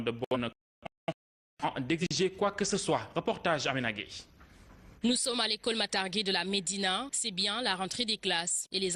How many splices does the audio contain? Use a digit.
1